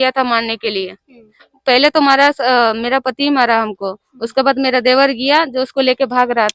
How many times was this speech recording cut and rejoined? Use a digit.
0